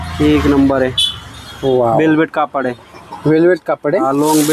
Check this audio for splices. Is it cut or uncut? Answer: uncut